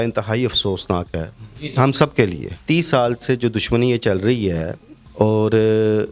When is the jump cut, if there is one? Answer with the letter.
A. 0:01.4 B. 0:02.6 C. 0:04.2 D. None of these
B